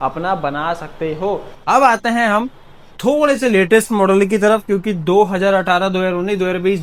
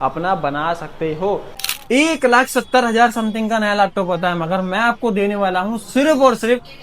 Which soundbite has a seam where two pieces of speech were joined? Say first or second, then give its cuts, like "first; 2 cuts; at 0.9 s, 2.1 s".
second; 1 cut; at 1.5 s